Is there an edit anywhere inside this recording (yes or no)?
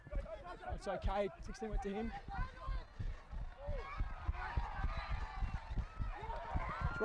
no